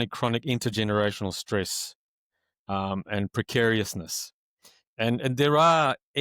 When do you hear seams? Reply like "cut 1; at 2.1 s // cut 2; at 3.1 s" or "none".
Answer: none